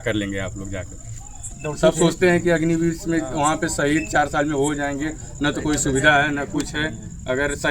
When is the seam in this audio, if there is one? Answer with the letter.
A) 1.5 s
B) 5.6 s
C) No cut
A